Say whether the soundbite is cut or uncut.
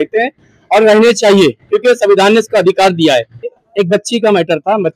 cut